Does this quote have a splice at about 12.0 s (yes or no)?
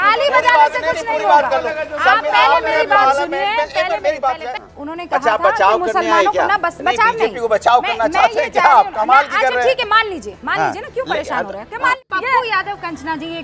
yes